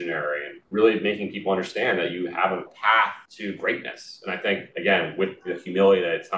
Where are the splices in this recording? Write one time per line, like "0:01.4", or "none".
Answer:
0:04.7